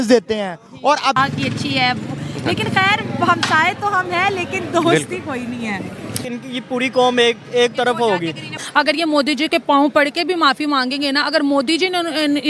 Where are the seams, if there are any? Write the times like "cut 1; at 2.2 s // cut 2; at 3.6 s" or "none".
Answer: cut 1; at 1.2 s // cut 2; at 6.2 s